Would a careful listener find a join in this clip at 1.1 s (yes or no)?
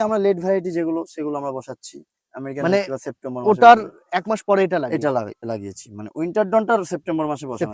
no